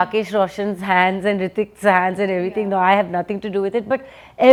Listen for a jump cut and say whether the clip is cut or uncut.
uncut